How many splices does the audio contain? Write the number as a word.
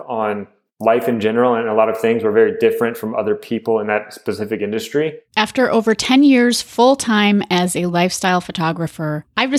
one